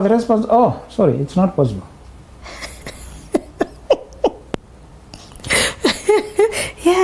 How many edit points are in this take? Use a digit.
0